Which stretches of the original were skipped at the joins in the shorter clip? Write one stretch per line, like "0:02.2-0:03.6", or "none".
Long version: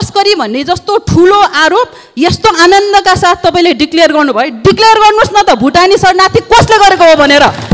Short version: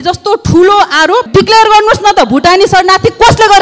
0:01.9-0:04.6

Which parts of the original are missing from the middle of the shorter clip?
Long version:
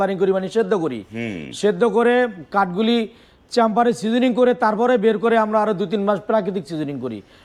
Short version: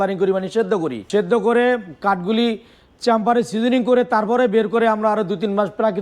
0:01.0-0:01.5

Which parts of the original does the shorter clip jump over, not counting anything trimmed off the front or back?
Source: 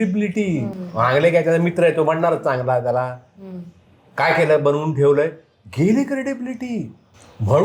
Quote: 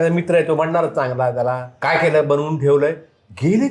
0:03.2-0:04.0

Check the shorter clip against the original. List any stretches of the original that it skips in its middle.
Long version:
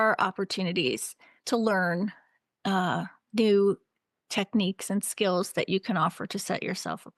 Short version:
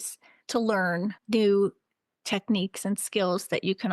0:02.2-0:03.3

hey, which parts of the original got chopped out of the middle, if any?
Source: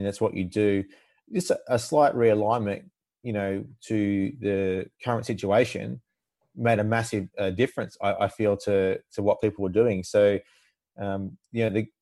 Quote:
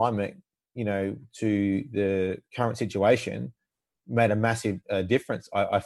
none

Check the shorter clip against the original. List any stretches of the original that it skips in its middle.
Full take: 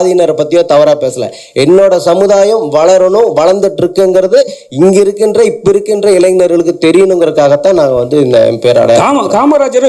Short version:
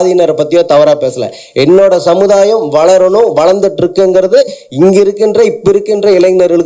none

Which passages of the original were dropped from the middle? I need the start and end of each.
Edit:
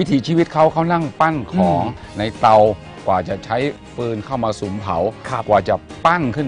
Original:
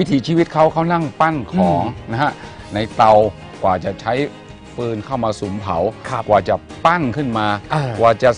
0:02.0-0:02.6
0:04.4-0:04.7

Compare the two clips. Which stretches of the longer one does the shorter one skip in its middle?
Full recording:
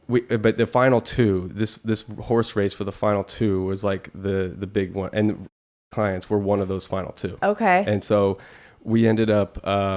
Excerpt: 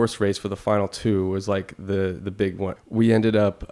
0:05.0-0:08.6

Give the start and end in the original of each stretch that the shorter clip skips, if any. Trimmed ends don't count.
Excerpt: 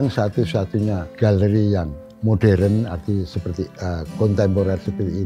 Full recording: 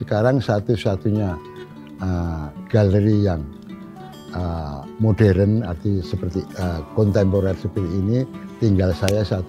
0:01.4-0:02.6
0:03.6-0:04.8

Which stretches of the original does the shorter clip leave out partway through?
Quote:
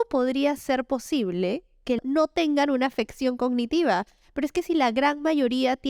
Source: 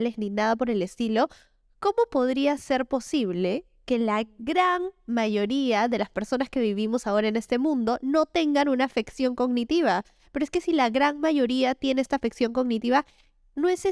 0:04.0-0:08.0

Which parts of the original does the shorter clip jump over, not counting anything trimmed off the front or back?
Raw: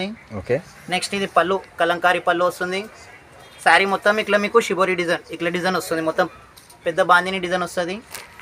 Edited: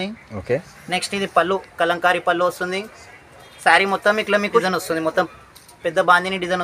0:04.6-0:05.6

